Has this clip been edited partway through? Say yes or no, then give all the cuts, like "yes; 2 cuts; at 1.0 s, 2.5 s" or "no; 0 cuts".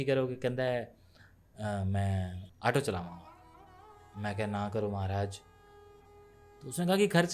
yes; 1 cut; at 2.4 s